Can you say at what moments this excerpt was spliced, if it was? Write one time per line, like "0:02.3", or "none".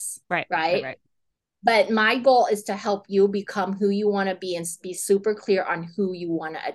none